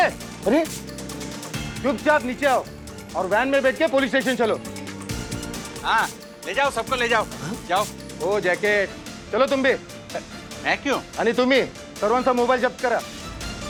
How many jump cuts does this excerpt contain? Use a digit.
0